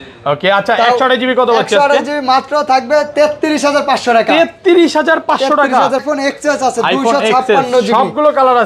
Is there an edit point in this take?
yes; 1 cut; at 6.0 s

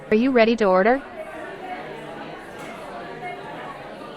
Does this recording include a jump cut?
yes; 1 cut; at 1.0 s

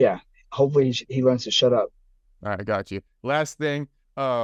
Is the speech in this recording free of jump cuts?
yes; 0 cuts

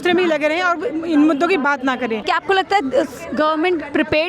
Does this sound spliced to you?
yes; 1 cut; at 2.3 s

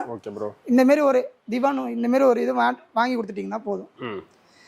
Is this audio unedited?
yes; 0 cuts

